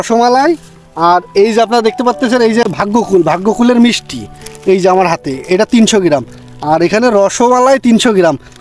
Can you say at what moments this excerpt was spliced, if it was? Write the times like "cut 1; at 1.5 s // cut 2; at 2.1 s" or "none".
cut 1; at 2.7 s